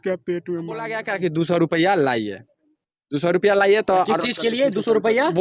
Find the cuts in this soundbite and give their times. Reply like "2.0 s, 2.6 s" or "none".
1.0 s